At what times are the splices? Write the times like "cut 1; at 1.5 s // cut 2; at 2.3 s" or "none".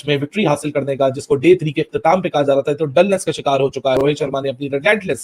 cut 1; at 4.0 s